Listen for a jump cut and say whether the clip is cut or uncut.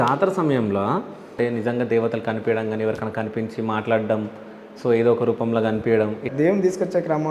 cut